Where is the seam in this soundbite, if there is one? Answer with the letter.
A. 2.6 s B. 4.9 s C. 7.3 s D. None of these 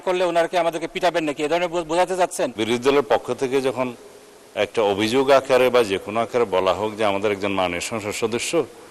A